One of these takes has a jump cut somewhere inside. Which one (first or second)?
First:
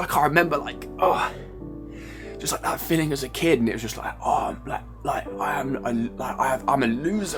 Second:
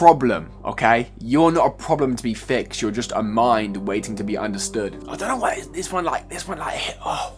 second